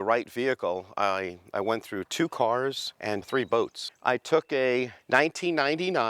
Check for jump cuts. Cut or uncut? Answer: cut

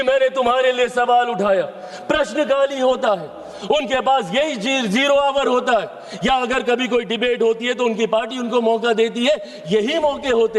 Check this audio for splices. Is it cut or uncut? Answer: uncut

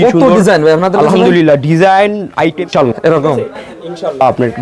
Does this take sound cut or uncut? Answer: cut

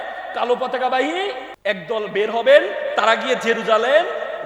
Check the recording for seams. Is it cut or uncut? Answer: cut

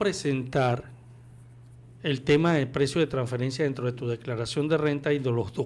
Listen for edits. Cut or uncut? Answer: uncut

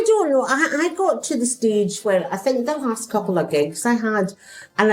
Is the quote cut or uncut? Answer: uncut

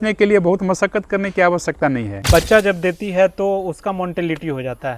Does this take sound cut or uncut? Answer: cut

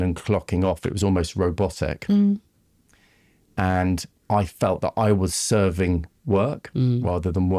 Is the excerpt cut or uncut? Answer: uncut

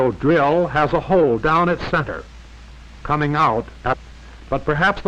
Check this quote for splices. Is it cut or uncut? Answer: uncut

